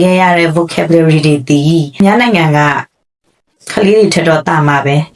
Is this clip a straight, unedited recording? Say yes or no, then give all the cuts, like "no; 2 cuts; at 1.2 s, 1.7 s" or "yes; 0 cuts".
no; 1 cut; at 2.0 s